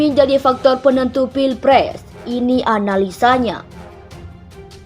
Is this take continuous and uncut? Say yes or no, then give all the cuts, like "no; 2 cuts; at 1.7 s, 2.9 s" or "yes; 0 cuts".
no; 1 cut; at 3.7 s